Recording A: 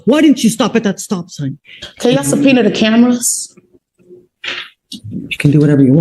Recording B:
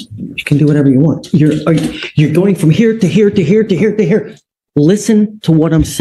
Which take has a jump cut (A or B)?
A